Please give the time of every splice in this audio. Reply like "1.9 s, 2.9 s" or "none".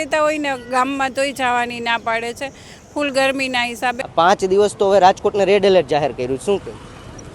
4.0 s